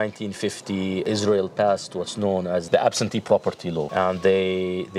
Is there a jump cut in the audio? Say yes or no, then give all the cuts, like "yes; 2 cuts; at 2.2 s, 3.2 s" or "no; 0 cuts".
yes; 3 cuts; at 1.1 s, 2.6 s, 3.9 s